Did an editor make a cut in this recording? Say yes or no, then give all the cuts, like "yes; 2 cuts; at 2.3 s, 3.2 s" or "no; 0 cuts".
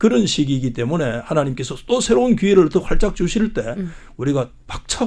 no; 0 cuts